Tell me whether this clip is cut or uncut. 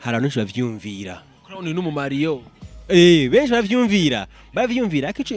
uncut